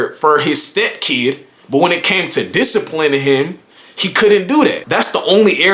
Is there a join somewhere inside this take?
yes; 1 cut; at 4.8 s

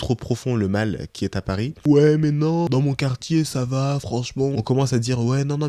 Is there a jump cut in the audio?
yes; 3 cuts; at 1.7 s, 2.7 s, 4.5 s

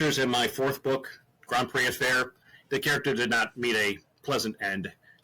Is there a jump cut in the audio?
yes; 1 cut; at 2.5 s

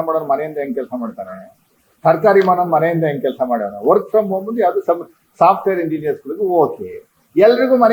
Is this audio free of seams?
yes; 0 cuts

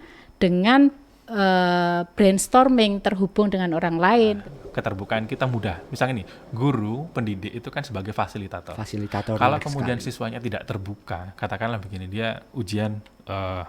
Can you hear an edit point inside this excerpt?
yes; 1 cut; at 4.4 s

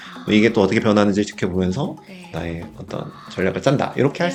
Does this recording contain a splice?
no; 0 cuts

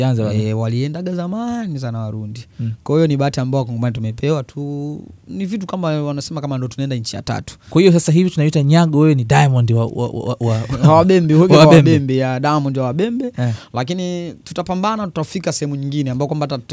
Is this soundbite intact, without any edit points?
no; 1 cut; at 7.5 s

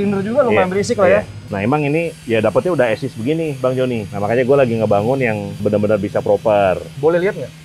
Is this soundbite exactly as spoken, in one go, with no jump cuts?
no; 2 cuts; at 4.1 s, 5.5 s

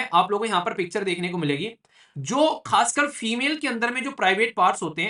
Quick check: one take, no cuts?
yes; 0 cuts

